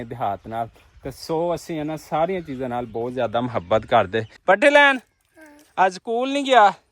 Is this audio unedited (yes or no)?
no